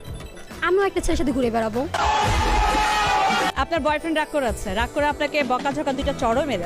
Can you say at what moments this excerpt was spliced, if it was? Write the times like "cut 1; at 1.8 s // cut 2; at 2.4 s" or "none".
cut 1; at 3.5 s

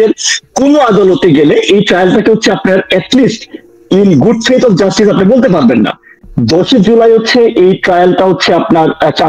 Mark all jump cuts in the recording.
none

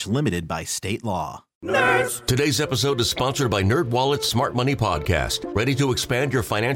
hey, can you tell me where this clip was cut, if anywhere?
cut 1; at 1.5 s

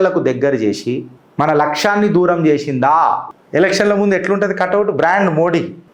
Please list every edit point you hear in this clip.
cut 1; at 3.3 s

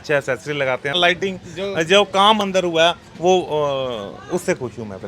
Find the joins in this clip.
cut 1; at 1.0 s

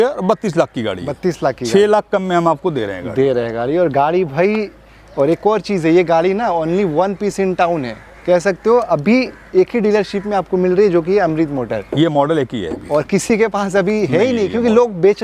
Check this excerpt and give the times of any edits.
none

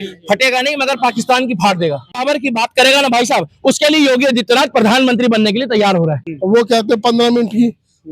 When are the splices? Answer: cut 1; at 2.2 s // cut 2; at 6.3 s

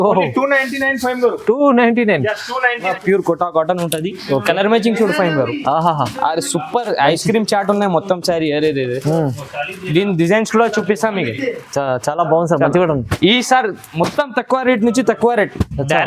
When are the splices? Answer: cut 1; at 3.0 s

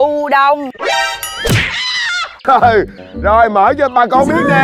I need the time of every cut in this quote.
cut 1; at 2.3 s

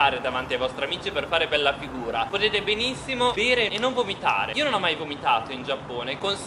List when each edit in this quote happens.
none

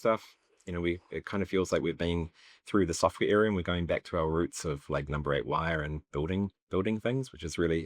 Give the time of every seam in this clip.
none

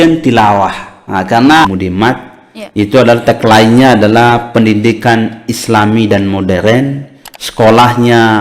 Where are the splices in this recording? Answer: cut 1; at 1.6 s

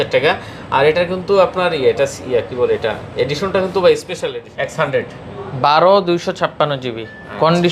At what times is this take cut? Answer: cut 1; at 4.2 s

